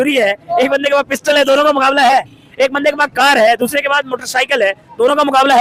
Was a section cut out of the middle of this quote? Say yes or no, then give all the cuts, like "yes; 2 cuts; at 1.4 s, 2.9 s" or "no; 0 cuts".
no; 0 cuts